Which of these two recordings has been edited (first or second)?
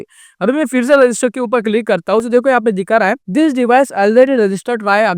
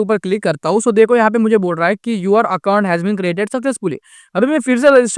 first